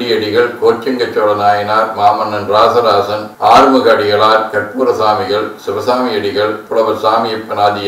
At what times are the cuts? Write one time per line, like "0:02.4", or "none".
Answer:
0:06.6